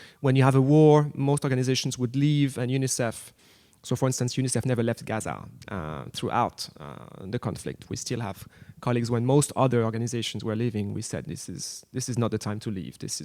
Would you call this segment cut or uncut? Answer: uncut